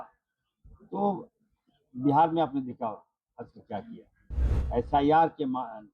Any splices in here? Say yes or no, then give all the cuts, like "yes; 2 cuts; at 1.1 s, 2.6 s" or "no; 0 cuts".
no; 0 cuts